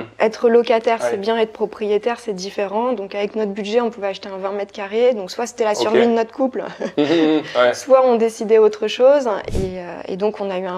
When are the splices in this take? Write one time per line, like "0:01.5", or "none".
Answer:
0:09.5